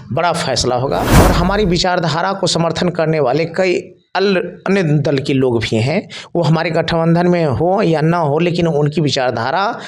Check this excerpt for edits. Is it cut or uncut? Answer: cut